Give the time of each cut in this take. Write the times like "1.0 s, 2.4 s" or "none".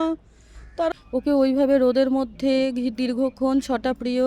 0.9 s